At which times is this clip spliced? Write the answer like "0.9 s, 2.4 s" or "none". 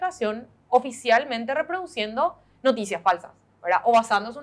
none